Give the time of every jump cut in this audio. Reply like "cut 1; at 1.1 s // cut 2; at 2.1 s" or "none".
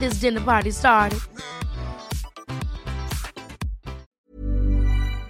cut 1; at 4.1 s